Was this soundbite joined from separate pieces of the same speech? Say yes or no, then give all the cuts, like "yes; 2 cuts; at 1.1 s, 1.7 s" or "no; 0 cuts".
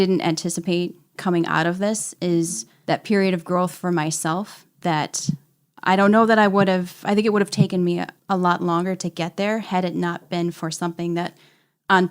yes; 3 cuts; at 1.1 s, 2.7 s, 8.1 s